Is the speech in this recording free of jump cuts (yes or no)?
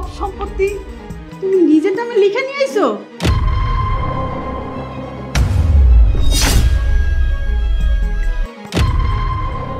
yes